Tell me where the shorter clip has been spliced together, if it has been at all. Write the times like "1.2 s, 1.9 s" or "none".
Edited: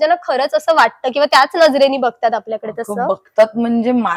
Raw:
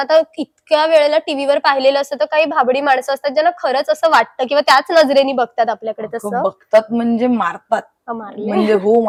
none